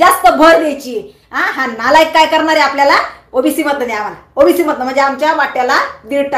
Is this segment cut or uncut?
uncut